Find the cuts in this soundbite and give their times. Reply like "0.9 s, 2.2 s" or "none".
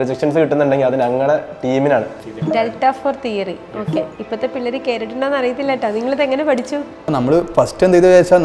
2.2 s, 7.1 s